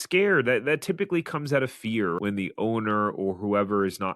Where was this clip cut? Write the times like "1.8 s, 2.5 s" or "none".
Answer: 2.2 s